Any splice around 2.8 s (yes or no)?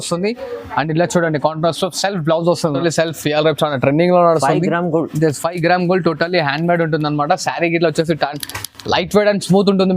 yes